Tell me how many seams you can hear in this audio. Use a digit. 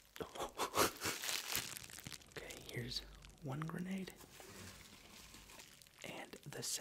2